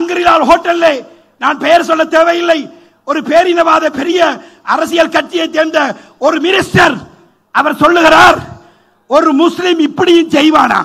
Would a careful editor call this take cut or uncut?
uncut